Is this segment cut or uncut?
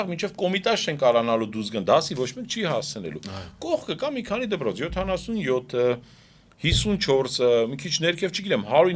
uncut